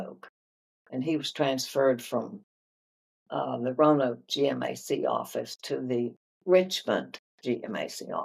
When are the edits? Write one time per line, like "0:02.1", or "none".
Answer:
none